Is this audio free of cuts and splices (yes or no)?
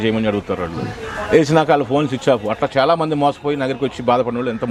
yes